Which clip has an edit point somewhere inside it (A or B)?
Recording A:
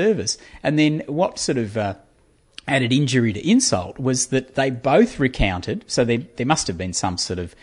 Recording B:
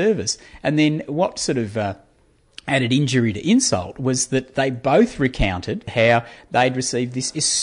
B